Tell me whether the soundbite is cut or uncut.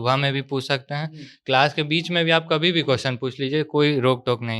uncut